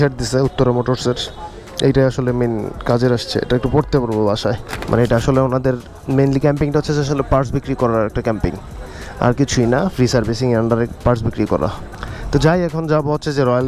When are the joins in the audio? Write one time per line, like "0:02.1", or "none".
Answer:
none